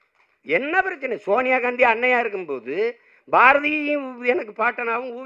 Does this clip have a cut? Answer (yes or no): no